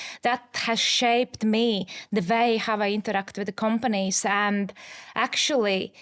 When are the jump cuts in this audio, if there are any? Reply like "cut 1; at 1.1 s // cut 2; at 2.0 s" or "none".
none